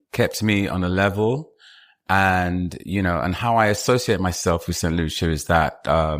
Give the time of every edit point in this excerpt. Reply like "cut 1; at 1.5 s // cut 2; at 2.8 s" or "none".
none